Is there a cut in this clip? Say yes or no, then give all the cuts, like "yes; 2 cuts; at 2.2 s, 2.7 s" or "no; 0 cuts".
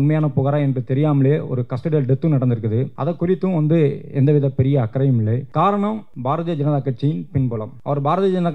yes; 4 cuts; at 2.9 s, 5.4 s, 6.1 s, 7.7 s